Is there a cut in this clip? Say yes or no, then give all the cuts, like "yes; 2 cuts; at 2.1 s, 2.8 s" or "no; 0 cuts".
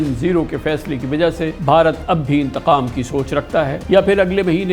yes; 2 cuts; at 1.6 s, 3.8 s